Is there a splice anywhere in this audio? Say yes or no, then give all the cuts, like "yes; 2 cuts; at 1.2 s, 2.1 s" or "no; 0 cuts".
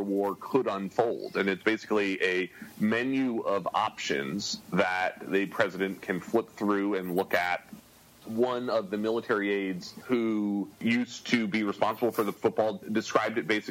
yes; 3 cuts; at 9.9 s, 10.7 s, 12.3 s